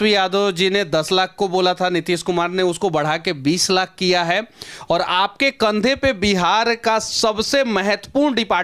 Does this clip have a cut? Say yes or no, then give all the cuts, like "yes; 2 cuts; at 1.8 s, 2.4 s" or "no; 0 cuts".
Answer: no; 0 cuts